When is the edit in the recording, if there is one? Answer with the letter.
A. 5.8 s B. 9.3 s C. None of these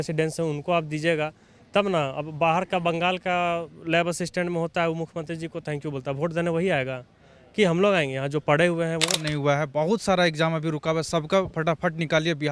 B